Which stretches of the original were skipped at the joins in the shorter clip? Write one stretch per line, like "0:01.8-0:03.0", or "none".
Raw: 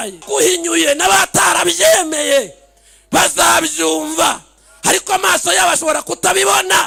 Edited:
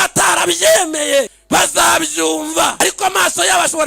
0:02.6-0:03.0
0:04.4-0:04.8

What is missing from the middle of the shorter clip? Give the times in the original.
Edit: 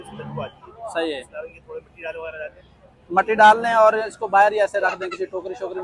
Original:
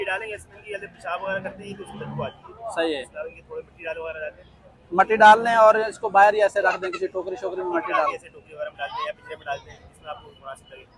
none

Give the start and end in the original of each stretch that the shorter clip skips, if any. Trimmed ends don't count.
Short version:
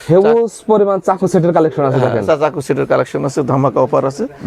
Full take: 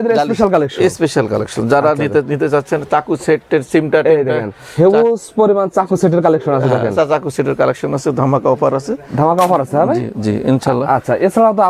none

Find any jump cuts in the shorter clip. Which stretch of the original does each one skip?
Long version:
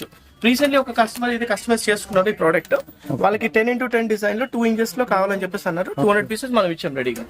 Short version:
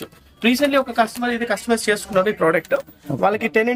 none

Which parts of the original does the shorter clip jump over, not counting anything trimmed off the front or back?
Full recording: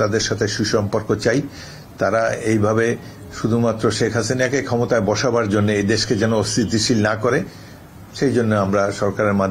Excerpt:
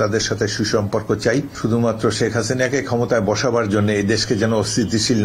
0:01.5-0:03.3

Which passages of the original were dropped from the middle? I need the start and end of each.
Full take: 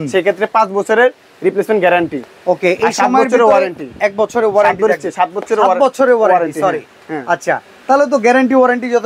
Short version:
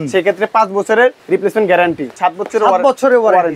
0:01.2-0:01.3
0:02.2-0:05.1

